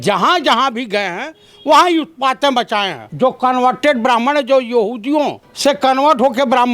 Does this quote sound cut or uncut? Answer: cut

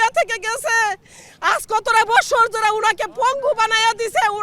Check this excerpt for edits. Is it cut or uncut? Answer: uncut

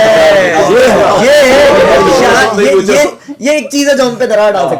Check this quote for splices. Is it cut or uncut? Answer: uncut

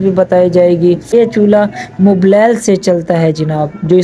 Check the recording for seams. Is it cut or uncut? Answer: cut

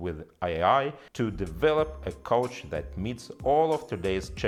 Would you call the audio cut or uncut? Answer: uncut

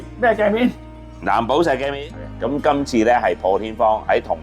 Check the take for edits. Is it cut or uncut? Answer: cut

